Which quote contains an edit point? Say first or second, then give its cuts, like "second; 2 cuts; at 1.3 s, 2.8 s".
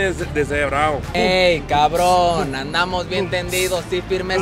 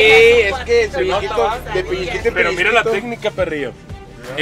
first; 1 cut; at 1.1 s